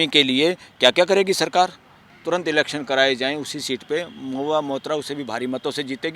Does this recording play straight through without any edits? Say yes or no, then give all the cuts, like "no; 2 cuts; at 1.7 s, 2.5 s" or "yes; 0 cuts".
no; 1 cut; at 2.1 s